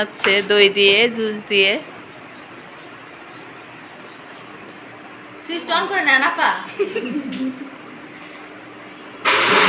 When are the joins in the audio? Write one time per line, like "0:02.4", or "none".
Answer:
none

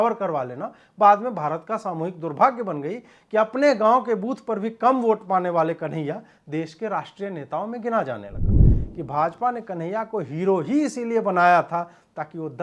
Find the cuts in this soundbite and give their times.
0:08.7

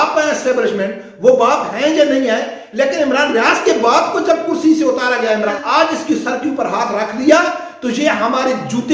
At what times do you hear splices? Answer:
0:05.6

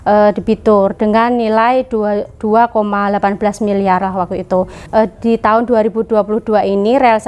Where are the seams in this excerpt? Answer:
0:04.8

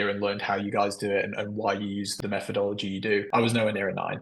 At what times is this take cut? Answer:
0:02.1

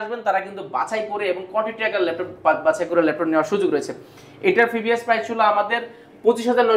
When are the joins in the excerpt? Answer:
none

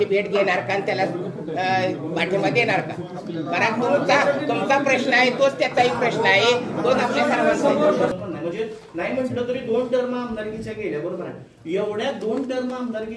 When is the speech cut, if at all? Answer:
0:08.1

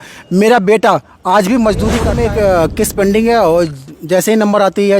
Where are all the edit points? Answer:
0:02.1

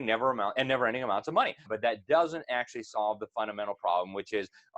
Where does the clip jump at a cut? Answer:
0:01.7

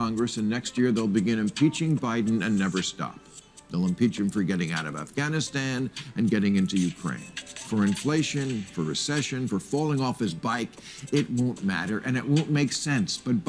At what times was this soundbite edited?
none

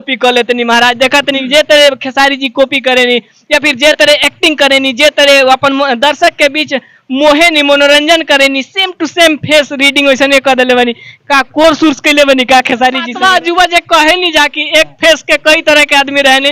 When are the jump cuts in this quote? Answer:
0:13.1

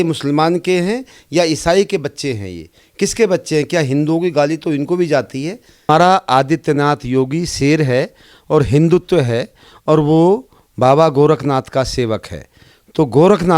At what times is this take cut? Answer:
0:05.9

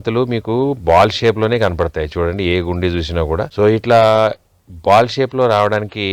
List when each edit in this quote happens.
0:03.5

